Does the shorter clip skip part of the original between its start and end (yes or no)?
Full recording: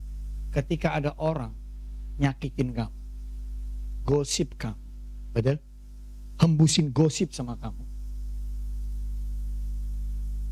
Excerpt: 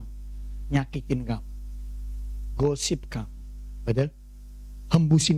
no